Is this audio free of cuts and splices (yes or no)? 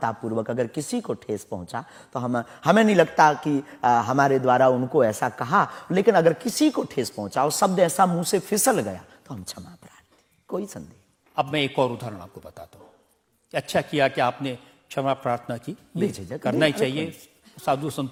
yes